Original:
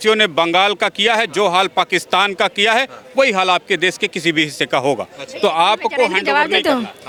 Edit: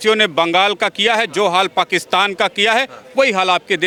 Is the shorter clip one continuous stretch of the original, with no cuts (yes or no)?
yes